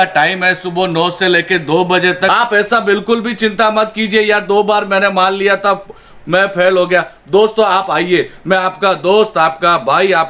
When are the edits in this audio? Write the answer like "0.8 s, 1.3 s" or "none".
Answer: 2.3 s